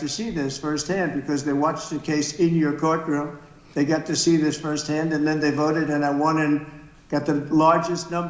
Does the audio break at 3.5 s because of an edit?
no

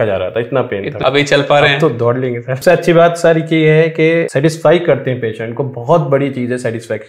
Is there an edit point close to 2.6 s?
yes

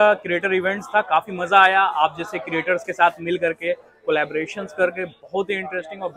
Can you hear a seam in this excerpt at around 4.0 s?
no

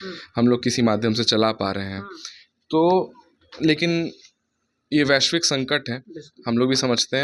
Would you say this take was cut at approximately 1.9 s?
no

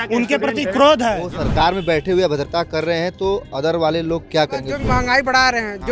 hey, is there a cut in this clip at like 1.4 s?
yes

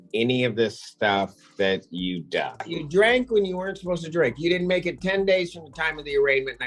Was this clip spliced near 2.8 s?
yes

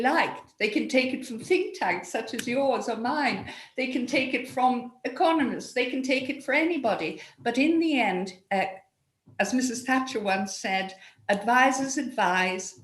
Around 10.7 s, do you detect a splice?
no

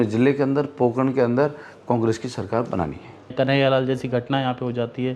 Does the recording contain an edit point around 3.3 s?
yes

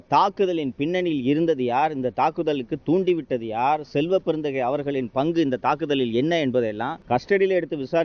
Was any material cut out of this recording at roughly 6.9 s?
yes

